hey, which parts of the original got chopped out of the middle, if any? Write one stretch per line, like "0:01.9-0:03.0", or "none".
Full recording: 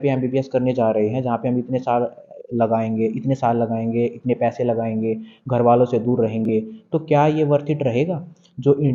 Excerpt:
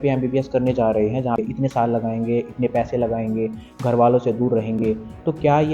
0:01.4-0:03.1